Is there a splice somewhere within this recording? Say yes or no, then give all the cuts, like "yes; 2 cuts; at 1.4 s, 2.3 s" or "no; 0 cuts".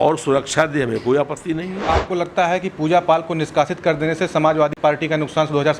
yes; 2 cuts; at 1.9 s, 4.7 s